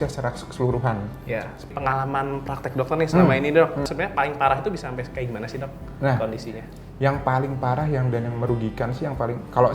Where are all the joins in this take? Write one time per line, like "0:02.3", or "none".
0:01.7